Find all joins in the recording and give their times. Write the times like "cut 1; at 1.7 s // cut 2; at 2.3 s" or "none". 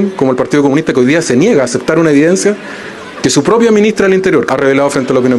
cut 1; at 4.5 s